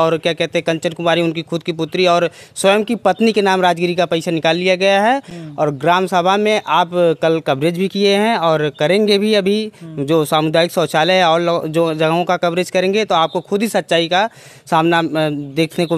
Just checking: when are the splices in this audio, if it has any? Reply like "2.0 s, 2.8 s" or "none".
none